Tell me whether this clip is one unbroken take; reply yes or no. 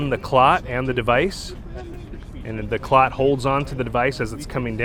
yes